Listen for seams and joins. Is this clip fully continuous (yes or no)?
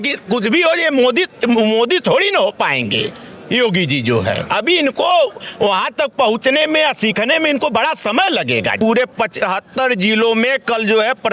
no